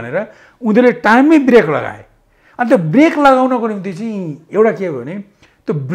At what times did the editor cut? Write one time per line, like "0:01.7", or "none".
none